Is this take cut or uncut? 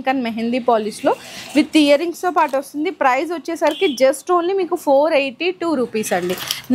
uncut